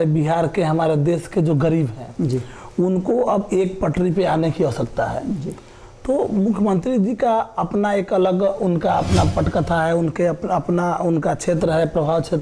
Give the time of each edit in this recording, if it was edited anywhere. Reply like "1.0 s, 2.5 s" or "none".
none